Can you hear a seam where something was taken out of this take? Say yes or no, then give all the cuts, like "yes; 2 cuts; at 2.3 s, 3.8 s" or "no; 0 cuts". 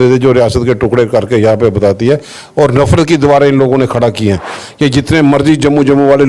yes; 1 cut; at 4.6 s